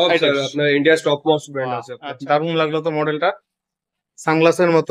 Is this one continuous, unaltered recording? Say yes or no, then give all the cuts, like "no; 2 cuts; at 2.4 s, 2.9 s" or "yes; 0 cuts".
no; 1 cut; at 1.9 s